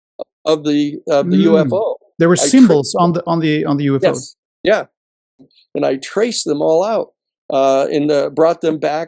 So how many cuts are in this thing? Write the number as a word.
one